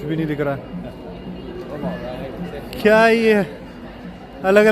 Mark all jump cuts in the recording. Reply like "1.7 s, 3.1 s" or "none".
none